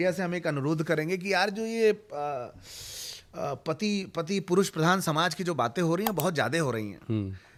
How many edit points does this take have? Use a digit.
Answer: 0